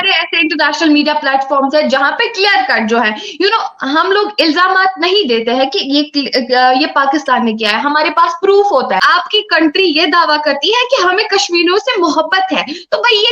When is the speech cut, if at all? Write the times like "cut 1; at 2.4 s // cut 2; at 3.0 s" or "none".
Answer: cut 1; at 9.0 s